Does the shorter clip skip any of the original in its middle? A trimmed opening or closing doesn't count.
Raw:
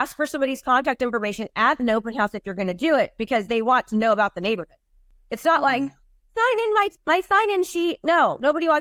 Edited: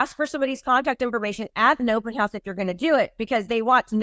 no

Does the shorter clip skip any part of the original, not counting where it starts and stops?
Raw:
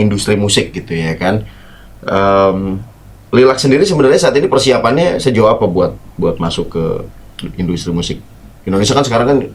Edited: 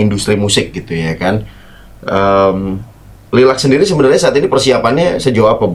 no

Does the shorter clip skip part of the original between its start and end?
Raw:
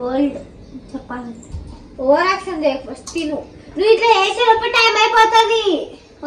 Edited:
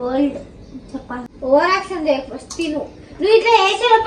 yes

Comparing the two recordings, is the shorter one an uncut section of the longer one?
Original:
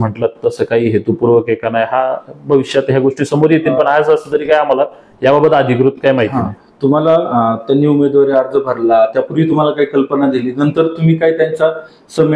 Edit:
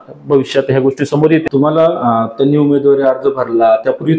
no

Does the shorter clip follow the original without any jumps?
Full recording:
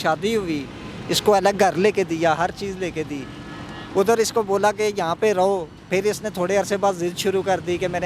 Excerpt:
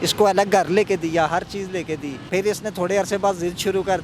no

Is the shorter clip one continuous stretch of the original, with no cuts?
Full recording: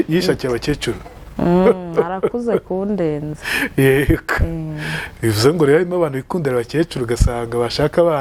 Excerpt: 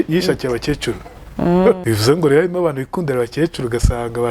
no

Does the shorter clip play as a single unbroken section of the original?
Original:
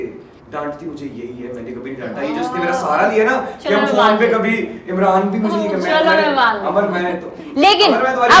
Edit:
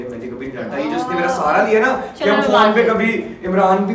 yes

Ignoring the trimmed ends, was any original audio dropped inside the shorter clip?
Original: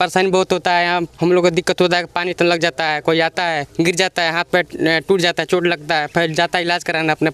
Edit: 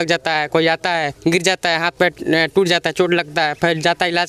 no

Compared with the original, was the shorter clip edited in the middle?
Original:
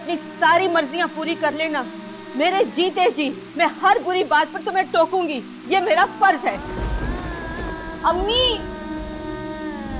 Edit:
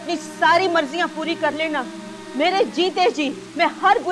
no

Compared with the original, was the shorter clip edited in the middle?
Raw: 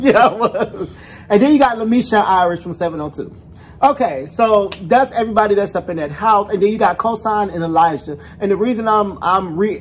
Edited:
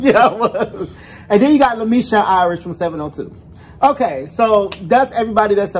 no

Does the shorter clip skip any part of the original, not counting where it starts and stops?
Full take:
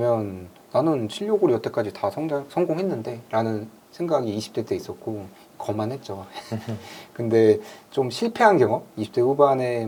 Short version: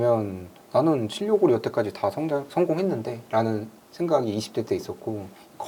no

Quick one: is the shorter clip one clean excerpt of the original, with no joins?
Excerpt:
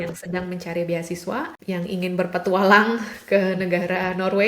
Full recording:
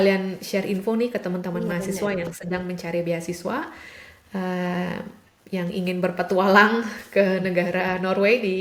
no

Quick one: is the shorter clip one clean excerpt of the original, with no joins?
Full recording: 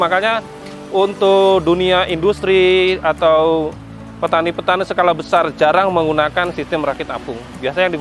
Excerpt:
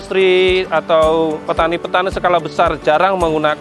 no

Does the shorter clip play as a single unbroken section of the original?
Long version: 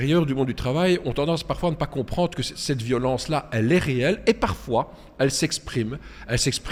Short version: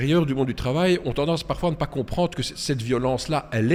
yes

